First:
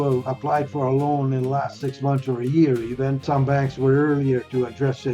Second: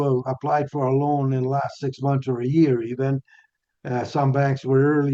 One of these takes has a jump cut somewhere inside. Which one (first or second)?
first